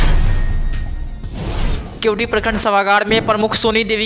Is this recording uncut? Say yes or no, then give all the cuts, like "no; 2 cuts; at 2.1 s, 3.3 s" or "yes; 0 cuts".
yes; 0 cuts